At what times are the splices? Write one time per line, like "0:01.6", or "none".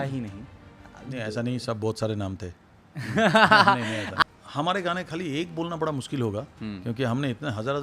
0:04.1